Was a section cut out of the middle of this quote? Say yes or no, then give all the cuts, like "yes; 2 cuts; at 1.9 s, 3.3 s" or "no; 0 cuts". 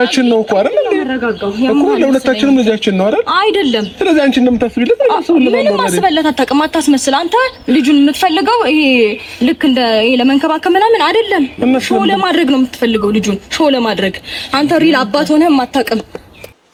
no; 0 cuts